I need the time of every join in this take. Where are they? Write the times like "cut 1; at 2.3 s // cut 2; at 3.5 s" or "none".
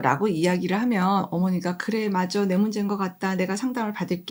none